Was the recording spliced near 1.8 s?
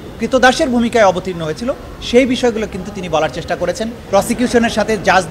no; 1 cut; at 4.0 s

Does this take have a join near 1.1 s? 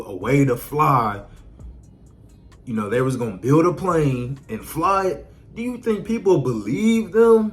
no; 0 cuts

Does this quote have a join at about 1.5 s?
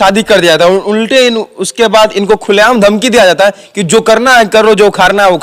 no; 0 cuts

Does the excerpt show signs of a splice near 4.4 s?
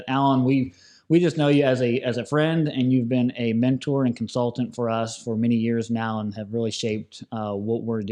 no; 0 cuts

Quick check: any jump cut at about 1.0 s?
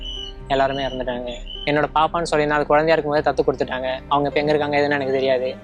no; 0 cuts

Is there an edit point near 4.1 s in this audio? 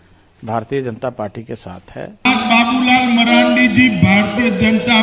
no; 1 cut; at 2.3 s

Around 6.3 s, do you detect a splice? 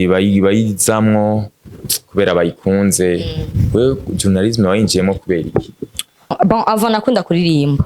yes; 1 cut; at 6.3 s

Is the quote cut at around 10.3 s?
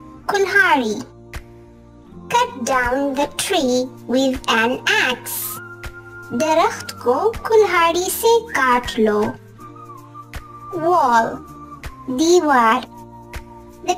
no; 0 cuts

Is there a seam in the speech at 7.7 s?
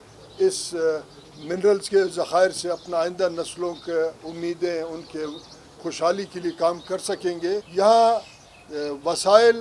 yes; 1 cut; at 7.7 s

